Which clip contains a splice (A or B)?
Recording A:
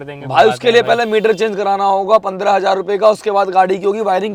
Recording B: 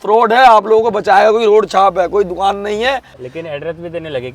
B